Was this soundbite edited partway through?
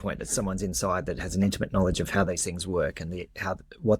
no; 0 cuts

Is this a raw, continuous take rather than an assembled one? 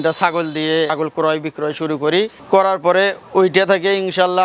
no; 1 cut; at 0.9 s

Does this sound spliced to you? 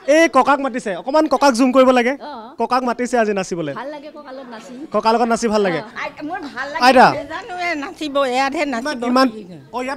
yes; 1 cut; at 5.8 s

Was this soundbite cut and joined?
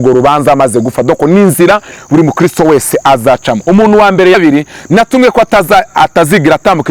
yes; 1 cut; at 4.3 s

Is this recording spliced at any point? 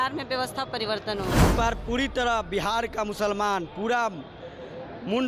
yes; 1 cut; at 1.5 s

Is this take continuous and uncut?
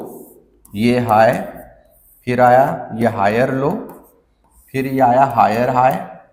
yes; 0 cuts

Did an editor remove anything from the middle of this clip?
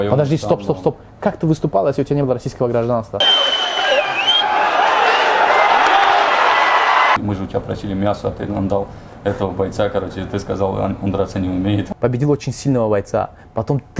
yes; 3 cuts; at 3.2 s, 7.2 s, 11.9 s

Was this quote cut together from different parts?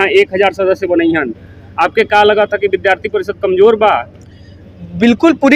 no; 0 cuts

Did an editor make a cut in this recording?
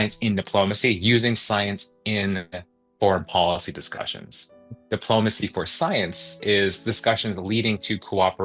no; 0 cuts

